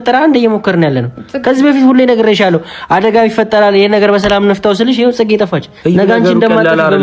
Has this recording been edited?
no; 0 cuts

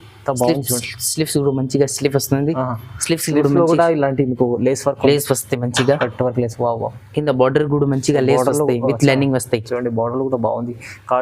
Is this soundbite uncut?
yes; 0 cuts

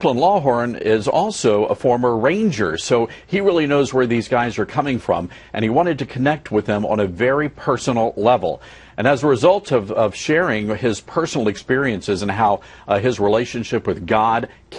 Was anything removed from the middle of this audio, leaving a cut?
yes; 1 cut; at 8.4 s

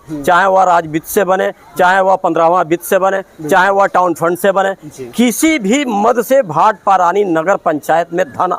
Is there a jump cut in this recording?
no; 0 cuts

